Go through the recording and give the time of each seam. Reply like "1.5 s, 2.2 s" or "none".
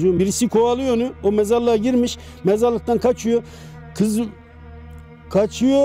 none